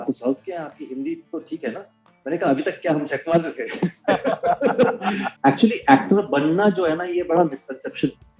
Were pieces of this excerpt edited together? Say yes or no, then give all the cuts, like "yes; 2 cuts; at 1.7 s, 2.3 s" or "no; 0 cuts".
yes; 1 cut; at 5.3 s